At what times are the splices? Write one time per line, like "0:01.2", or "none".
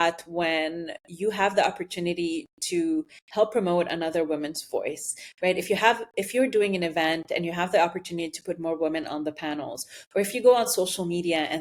none